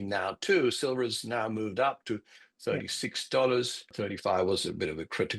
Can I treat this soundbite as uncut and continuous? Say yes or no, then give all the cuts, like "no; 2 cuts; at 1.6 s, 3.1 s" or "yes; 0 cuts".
no; 1 cut; at 3.8 s